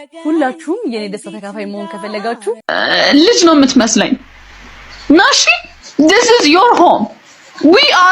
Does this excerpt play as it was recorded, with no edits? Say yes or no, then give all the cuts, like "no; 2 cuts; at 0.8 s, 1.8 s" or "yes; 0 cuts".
no; 1 cut; at 2.6 s